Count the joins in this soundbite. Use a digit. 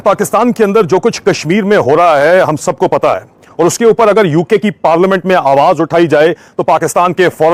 0